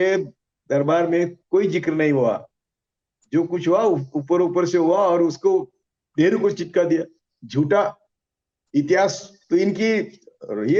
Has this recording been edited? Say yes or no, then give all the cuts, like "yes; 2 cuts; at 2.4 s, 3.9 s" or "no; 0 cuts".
no; 0 cuts